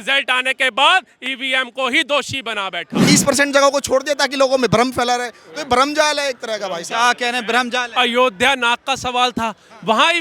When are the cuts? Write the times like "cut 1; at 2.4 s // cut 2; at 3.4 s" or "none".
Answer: cut 1; at 3.0 s